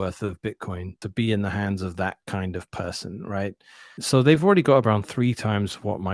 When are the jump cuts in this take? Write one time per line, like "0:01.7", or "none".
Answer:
0:01.0
0:04.0